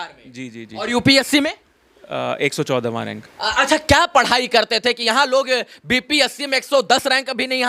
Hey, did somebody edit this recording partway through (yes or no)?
no